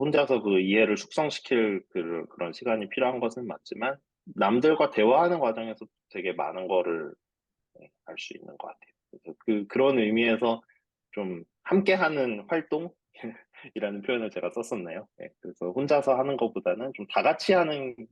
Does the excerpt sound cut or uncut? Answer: cut